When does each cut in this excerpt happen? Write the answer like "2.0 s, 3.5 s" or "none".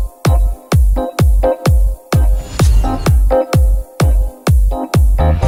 none